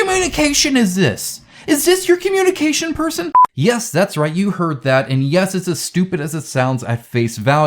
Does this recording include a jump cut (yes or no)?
yes